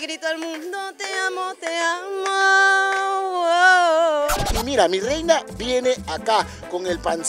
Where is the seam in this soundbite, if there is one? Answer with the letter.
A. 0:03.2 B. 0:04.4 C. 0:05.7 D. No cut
B